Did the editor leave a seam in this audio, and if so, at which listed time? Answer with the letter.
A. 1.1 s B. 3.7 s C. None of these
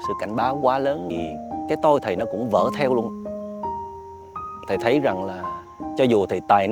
A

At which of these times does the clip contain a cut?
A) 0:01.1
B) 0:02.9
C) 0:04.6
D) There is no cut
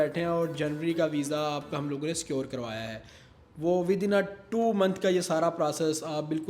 D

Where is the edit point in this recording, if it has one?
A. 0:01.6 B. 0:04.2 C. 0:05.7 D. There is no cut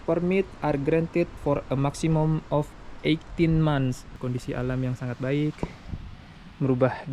B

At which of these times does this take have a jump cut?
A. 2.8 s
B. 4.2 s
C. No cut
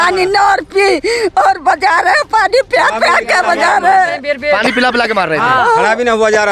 C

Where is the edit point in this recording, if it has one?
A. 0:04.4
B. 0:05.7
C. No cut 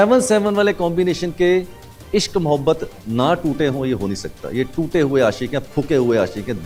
C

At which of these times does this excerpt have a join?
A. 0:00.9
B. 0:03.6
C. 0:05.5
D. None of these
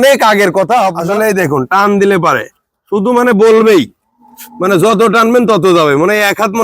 A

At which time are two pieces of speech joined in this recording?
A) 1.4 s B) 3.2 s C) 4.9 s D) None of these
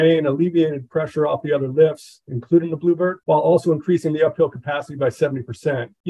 B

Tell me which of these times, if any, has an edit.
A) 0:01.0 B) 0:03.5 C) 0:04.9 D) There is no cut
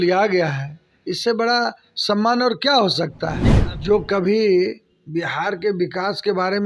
B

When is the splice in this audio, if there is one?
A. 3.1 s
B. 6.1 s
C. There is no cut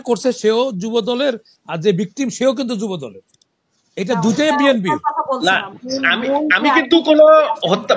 C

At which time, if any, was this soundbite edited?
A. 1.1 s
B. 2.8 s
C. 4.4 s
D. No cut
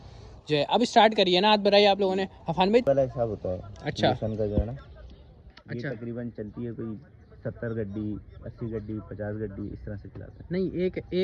B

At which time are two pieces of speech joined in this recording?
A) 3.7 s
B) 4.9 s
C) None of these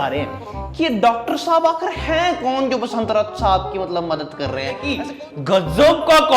B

